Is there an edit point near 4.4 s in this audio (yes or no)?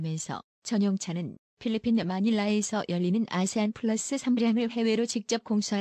no